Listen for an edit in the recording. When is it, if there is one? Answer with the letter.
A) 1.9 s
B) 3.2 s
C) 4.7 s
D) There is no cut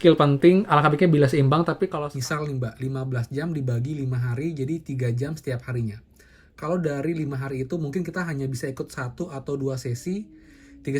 A